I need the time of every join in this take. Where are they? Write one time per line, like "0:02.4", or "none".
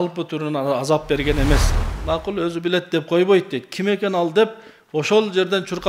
0:01.7